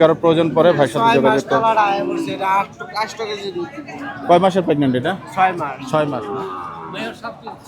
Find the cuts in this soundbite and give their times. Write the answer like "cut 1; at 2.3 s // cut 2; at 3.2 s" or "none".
cut 1; at 6.2 s